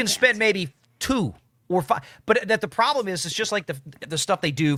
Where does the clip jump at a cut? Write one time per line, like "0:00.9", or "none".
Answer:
none